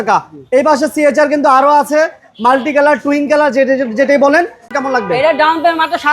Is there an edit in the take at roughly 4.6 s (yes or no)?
yes